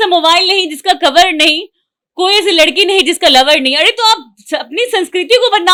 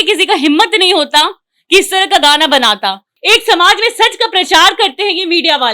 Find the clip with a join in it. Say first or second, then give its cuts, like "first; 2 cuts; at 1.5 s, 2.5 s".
second; 1 cut; at 3.1 s